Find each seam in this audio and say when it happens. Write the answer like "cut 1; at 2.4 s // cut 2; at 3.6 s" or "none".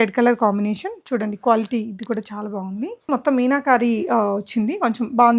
cut 1; at 3.1 s